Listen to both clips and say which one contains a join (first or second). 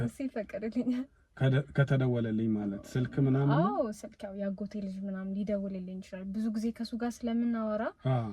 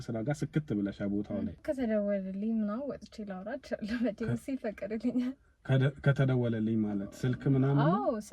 second